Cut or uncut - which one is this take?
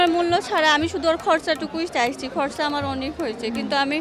uncut